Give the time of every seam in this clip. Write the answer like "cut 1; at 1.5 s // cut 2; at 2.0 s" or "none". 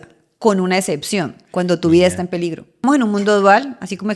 cut 1; at 1.4 s // cut 2; at 2.8 s